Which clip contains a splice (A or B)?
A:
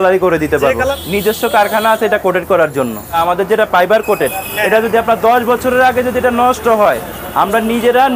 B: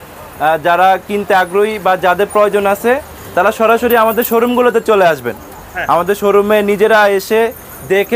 A